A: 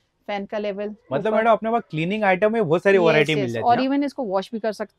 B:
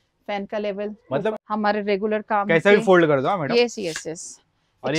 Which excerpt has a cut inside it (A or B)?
B